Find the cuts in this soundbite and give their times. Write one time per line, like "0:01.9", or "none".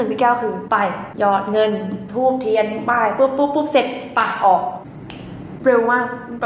0:01.0
0:05.4